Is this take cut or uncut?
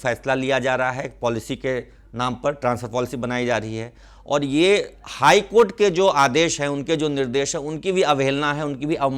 uncut